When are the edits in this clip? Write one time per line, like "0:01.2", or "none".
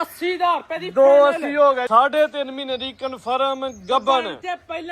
0:01.9